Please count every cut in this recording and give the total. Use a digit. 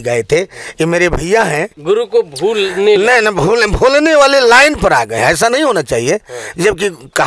1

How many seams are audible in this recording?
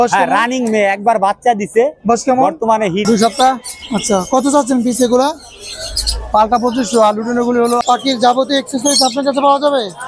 2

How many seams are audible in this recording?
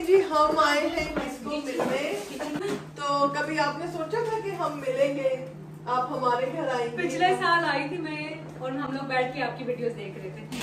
1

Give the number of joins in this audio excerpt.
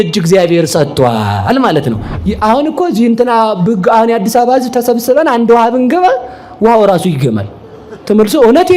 1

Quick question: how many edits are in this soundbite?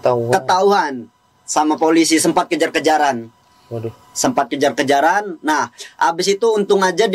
0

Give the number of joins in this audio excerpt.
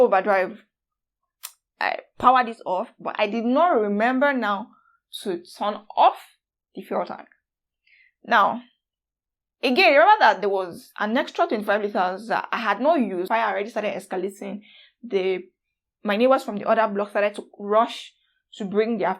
1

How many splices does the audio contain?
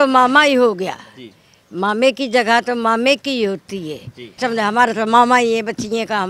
1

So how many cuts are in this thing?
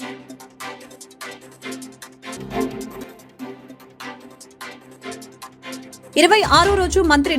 0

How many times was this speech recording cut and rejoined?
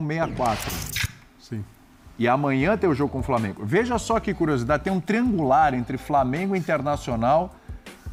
0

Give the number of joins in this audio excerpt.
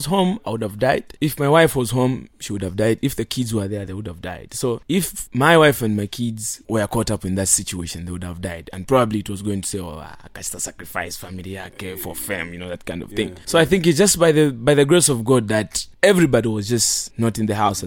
6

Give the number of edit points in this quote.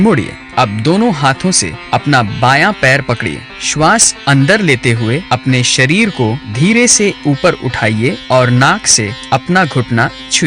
3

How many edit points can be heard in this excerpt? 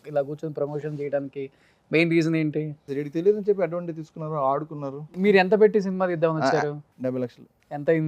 1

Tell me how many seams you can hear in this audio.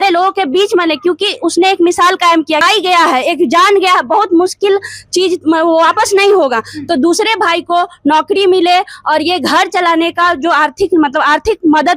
1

